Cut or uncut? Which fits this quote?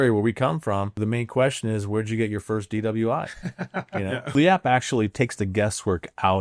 cut